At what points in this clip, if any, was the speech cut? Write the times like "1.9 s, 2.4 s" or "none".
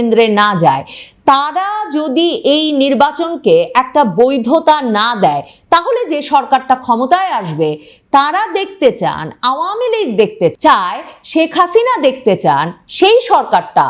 10.5 s